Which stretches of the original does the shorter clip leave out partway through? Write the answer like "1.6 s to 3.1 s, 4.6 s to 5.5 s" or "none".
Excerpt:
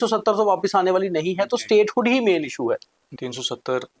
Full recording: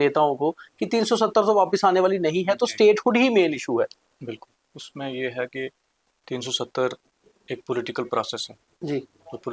4.1 s to 6.1 s